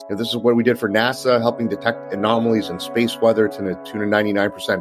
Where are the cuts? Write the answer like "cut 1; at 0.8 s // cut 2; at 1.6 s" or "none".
none

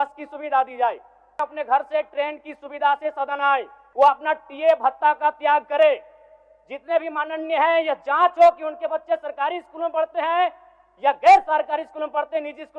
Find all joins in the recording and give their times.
cut 1; at 1.4 s // cut 2; at 3.8 s

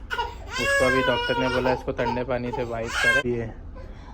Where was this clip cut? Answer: cut 1; at 3.2 s

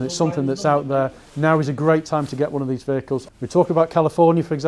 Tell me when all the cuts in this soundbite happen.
cut 1; at 3.3 s

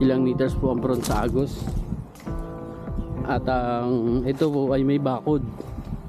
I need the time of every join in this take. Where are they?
none

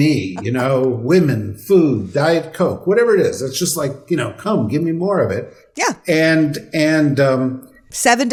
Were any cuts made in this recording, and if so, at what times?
none

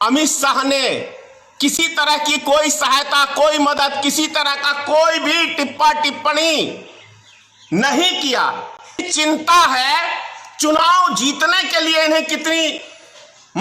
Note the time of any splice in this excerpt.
cut 1; at 9.0 s

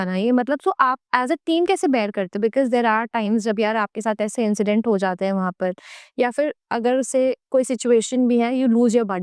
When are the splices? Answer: none

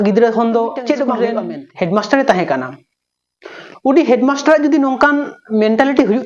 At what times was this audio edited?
cut 1; at 1.3 s

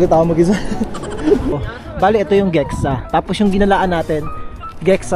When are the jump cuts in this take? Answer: cut 1; at 1.6 s

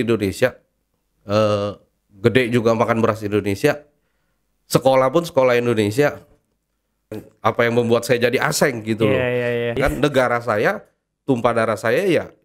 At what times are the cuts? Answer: cut 1; at 7.2 s // cut 2; at 9.8 s

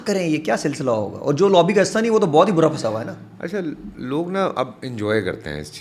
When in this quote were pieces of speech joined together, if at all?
none

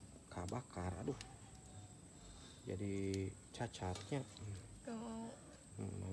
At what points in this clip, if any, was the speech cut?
none

